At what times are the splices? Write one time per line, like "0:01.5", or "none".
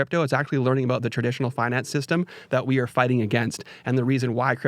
none